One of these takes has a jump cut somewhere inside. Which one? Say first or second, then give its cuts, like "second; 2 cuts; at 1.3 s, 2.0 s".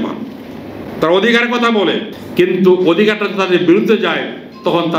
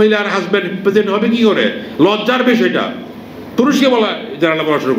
first; 1 cut; at 2.1 s